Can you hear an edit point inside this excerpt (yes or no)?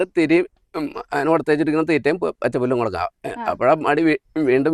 no